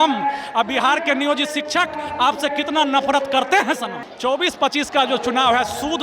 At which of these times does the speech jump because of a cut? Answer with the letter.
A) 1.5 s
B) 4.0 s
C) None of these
B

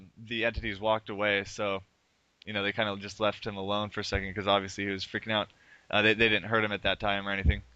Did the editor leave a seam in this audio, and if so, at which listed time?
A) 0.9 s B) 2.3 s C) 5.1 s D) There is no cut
C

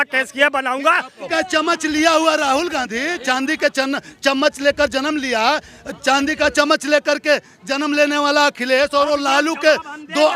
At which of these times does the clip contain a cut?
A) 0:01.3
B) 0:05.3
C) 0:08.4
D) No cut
A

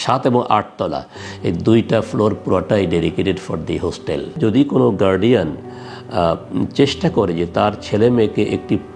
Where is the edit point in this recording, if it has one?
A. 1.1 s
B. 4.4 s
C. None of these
B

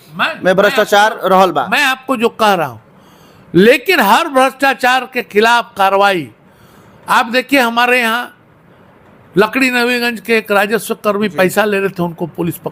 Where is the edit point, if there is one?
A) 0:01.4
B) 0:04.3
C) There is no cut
C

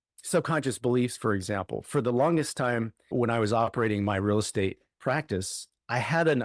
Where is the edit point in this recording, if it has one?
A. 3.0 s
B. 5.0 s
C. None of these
A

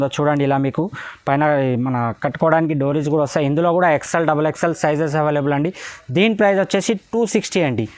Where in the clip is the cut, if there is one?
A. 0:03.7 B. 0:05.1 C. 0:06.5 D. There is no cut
D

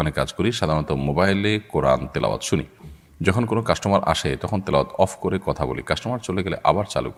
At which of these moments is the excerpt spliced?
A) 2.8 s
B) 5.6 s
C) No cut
C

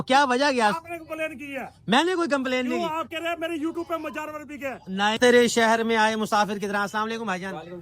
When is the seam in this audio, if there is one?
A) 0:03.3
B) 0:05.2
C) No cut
B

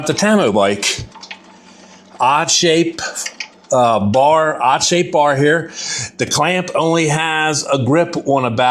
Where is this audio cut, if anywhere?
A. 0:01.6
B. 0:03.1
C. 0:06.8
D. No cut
D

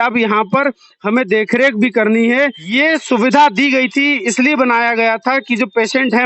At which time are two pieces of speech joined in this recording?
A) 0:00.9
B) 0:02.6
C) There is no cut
B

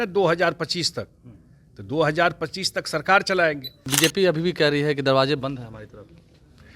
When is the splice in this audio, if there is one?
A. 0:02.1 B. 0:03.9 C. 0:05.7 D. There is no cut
B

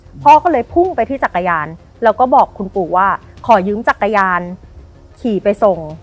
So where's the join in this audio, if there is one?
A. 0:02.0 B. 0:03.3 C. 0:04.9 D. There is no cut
D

